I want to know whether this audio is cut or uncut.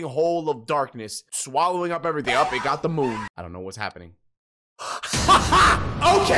cut